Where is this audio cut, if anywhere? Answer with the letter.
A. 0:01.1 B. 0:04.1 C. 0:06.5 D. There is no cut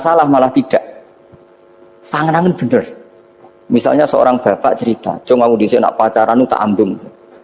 D